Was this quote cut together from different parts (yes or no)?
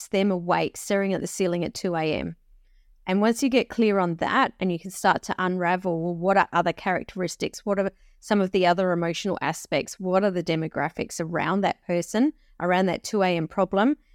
no